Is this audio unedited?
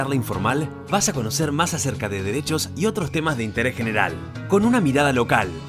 yes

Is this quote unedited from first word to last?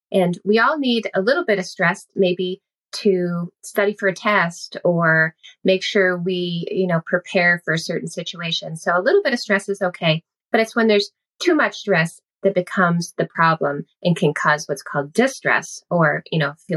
yes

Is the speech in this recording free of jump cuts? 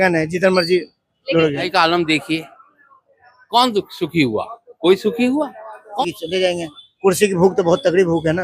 no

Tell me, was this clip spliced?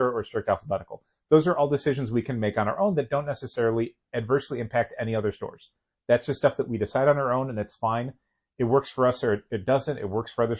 no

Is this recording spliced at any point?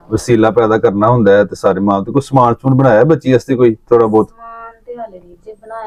no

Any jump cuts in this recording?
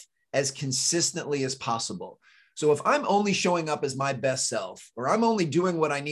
no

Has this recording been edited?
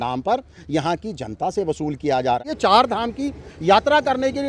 yes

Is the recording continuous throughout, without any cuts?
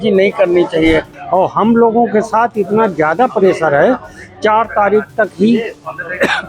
no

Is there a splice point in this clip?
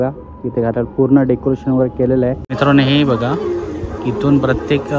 yes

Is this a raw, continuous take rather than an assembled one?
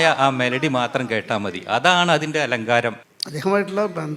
no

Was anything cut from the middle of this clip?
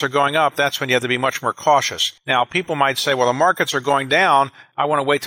no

